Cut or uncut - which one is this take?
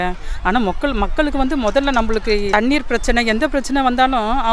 cut